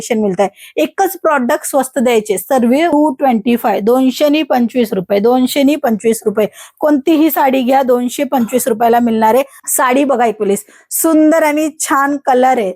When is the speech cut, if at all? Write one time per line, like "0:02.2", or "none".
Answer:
0:02.9
0:09.6